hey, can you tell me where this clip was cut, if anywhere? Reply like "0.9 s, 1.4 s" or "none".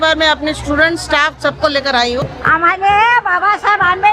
2.2 s